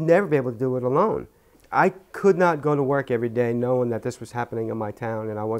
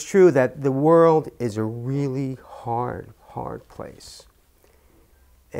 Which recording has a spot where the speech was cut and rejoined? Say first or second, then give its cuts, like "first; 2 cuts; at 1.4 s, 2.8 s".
first; 1 cut; at 1.2 s